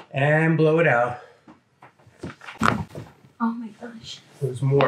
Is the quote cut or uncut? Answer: uncut